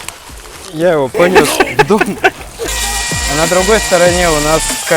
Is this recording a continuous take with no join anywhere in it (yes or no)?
no